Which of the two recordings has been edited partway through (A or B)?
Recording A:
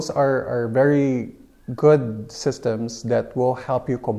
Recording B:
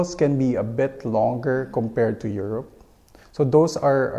B